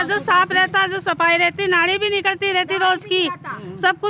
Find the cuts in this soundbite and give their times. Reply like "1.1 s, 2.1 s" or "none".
none